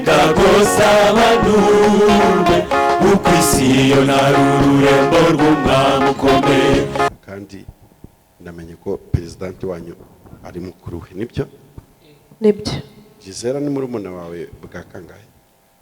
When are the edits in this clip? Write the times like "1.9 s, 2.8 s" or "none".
7.1 s